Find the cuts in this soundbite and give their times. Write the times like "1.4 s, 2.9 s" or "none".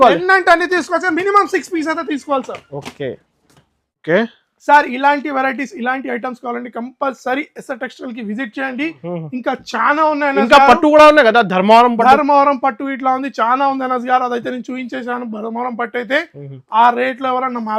none